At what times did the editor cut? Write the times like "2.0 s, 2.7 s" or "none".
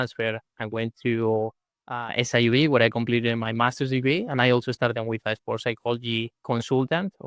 6.4 s

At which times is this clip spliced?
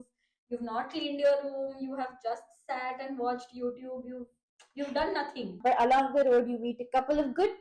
5.5 s

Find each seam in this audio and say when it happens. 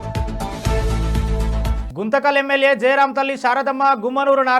1.8 s

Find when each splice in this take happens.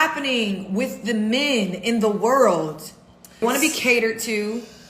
3.4 s

